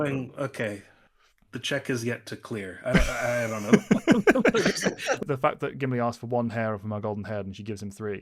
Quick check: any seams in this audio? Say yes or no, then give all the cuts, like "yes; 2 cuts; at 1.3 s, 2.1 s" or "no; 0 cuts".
yes; 1 cut; at 5.2 s